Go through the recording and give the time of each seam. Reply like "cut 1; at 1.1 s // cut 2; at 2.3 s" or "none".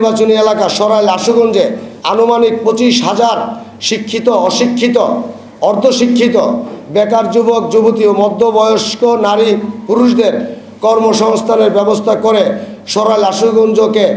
cut 1; at 1.9 s